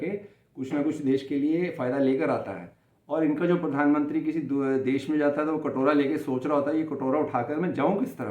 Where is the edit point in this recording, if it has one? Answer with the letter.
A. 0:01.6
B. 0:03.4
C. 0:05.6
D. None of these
D